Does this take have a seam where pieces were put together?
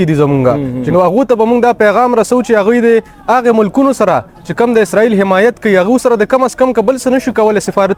no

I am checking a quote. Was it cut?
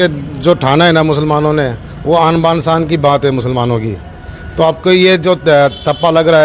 no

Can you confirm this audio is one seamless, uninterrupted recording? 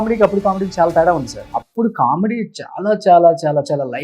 no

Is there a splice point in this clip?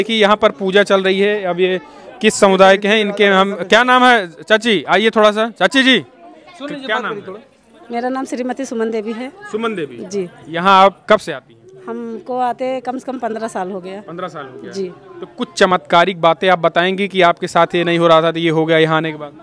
no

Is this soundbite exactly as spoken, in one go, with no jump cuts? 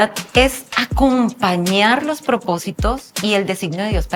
yes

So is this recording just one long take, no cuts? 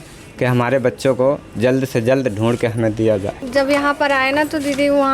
no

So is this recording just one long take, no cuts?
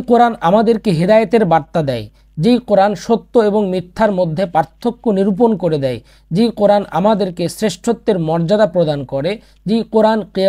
yes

